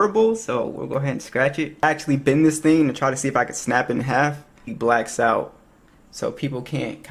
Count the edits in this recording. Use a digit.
2